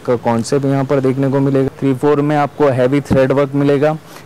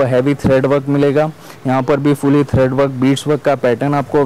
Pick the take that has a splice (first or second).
first